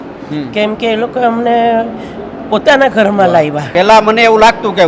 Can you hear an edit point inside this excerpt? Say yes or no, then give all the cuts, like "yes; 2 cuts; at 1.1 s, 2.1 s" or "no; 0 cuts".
yes; 1 cut; at 3.6 s